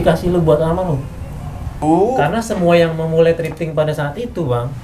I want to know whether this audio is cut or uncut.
cut